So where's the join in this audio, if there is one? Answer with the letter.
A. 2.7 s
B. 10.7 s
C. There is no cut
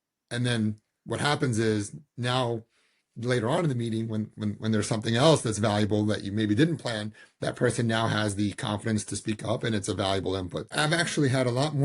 B